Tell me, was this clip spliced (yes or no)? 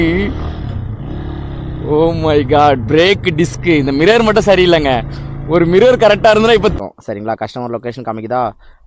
yes